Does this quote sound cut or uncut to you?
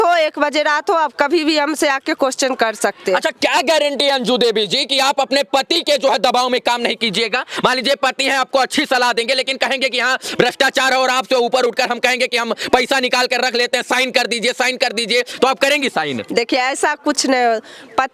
uncut